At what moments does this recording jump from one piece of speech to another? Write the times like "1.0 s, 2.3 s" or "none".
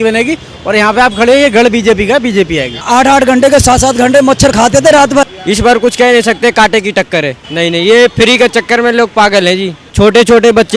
2.8 s, 5.2 s, 7.4 s, 9.8 s